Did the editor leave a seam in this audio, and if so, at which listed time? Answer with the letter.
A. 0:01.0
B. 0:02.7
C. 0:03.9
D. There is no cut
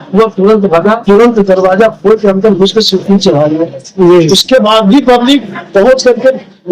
A